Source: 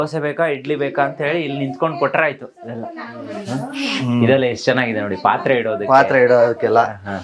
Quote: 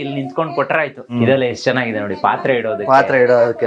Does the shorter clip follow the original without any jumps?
no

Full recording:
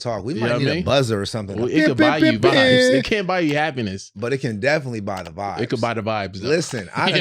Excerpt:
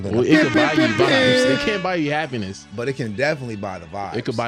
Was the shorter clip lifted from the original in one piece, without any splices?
yes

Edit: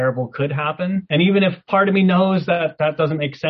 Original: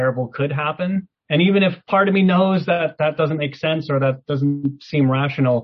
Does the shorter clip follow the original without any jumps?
no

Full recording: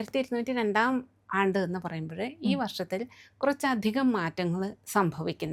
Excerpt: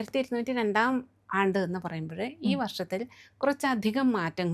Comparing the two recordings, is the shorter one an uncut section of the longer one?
yes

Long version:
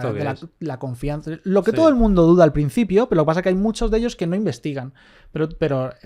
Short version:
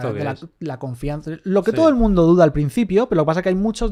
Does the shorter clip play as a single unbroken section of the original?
yes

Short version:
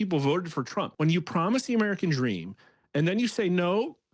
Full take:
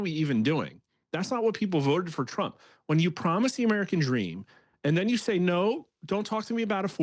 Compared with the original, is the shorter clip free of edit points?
no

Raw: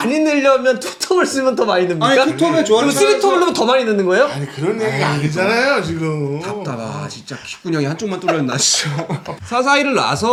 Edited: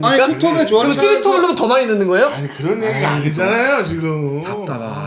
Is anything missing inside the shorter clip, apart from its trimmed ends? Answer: no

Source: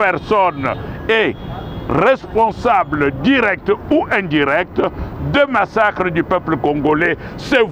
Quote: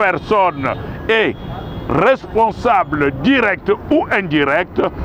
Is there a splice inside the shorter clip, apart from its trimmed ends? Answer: no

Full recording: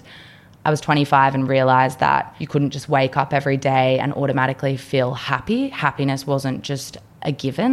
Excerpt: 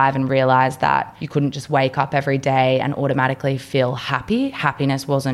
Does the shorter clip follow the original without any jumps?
yes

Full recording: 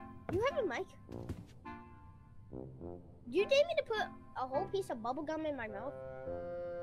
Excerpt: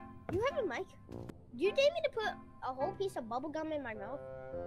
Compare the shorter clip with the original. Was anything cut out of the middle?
yes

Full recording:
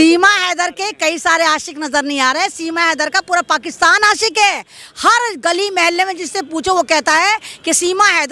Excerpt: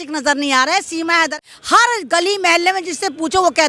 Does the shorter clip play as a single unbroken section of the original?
no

